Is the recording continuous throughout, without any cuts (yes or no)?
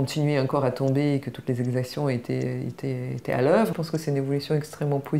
no